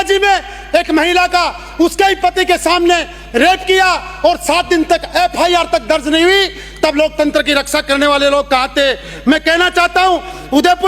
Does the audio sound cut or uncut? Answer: uncut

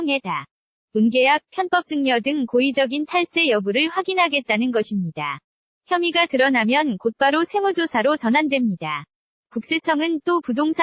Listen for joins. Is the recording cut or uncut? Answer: uncut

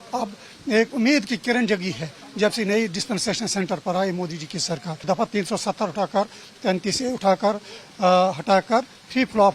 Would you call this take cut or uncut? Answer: cut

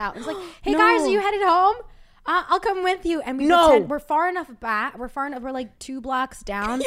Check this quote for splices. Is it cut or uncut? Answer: uncut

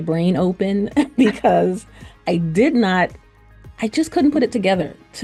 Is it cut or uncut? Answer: uncut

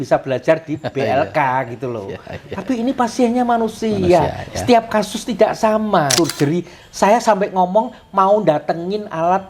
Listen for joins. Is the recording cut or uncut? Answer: cut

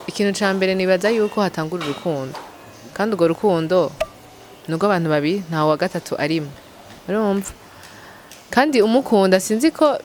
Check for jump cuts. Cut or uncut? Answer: uncut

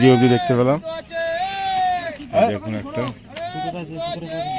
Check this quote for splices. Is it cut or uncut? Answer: uncut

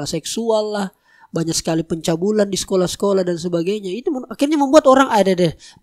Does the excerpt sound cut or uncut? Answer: uncut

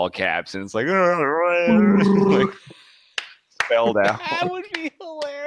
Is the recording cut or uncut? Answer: uncut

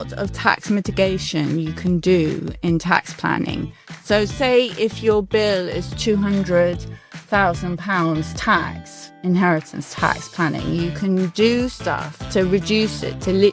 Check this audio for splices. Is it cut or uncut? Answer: uncut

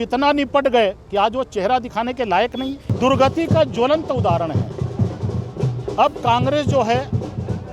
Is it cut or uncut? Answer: cut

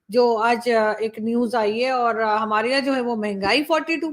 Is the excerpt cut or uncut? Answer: uncut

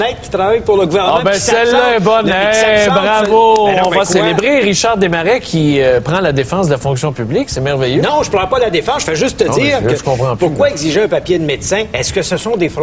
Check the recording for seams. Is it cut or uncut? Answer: uncut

